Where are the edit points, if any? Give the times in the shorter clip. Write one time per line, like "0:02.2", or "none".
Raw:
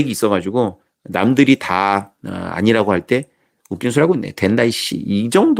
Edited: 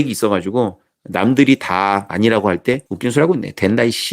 0:02.1
0:02.9